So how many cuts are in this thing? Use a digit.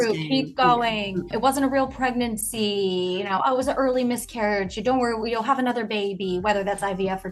1